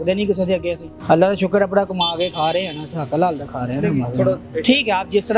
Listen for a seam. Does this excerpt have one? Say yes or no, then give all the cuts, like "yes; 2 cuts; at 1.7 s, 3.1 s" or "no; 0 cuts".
no; 0 cuts